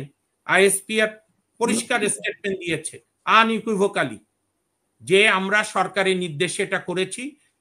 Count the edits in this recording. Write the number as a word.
zero